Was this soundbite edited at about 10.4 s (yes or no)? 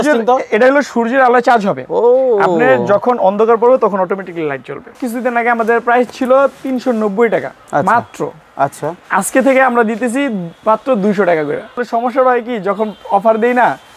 no